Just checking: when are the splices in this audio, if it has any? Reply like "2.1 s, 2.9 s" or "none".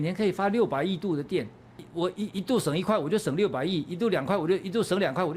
1.8 s